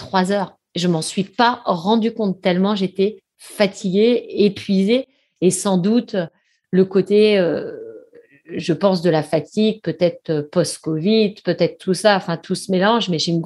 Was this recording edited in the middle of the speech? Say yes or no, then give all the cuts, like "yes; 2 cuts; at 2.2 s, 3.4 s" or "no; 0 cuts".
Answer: no; 0 cuts